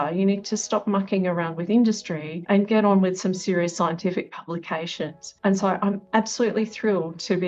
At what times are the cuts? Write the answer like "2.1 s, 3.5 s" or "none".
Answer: none